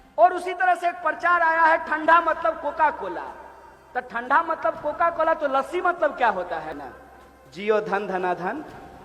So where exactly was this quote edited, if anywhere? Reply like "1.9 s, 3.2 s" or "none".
6.7 s

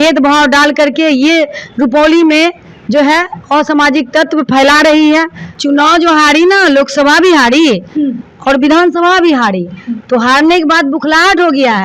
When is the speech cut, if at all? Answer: 5.4 s

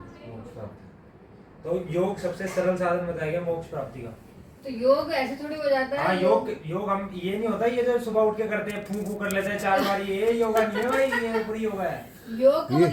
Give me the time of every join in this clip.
none

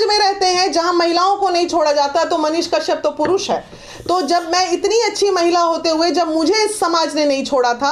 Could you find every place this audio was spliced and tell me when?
none

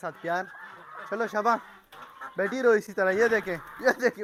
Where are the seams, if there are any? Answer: none

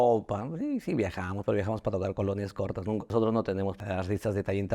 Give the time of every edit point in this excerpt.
3.1 s, 3.8 s

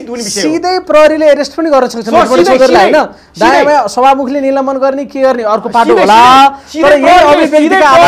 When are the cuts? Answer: none

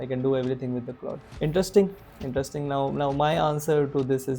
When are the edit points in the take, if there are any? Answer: 1.2 s

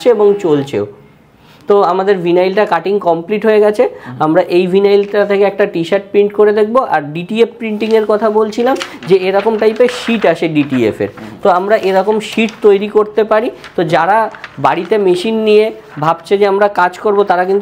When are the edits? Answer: none

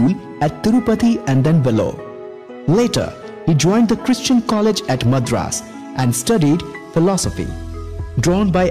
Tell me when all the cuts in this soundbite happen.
none

